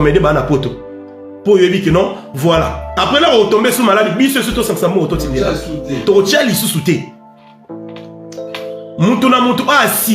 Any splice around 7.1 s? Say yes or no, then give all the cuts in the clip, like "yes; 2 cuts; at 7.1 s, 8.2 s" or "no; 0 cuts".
yes; 2 cuts; at 7.1 s, 8.8 s